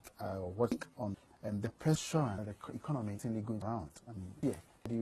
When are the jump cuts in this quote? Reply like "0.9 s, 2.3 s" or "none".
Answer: 3.3 s

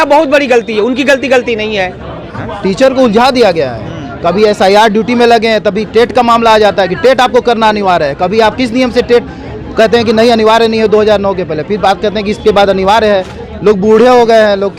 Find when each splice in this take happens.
2.4 s

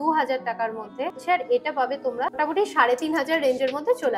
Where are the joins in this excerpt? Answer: 1.2 s, 2.4 s

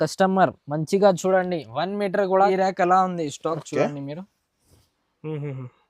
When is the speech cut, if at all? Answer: 2.5 s

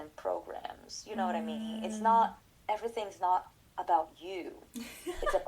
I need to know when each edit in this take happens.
2.5 s

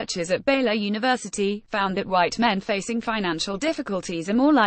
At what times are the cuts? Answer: 1.8 s

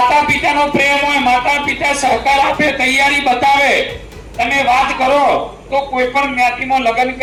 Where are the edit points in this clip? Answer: none

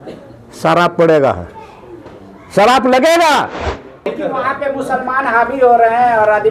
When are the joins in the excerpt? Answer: 4.1 s

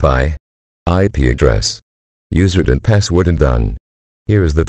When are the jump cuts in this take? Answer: 3.4 s

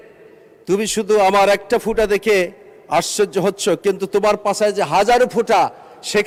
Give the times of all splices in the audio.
none

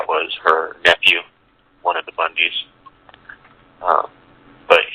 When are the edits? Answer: none

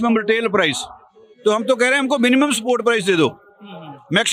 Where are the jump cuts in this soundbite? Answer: none

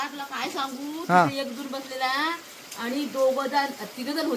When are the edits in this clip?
none

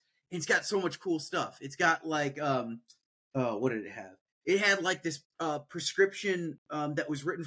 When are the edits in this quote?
none

